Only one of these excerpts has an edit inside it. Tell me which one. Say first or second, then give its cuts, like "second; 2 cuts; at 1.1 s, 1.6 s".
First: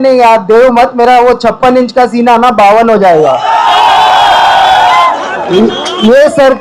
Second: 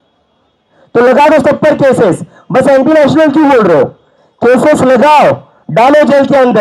first; 1 cut; at 5.1 s